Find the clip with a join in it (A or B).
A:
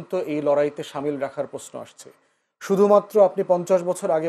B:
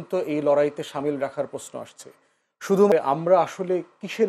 B